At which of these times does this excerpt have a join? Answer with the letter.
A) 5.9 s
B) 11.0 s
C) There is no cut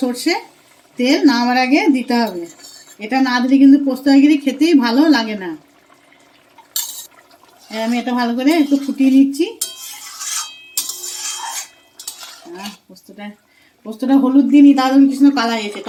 C